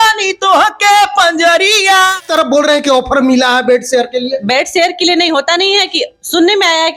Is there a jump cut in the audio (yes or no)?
yes